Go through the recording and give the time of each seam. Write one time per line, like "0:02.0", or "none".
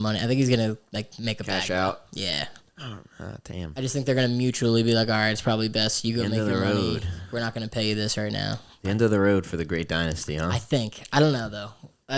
none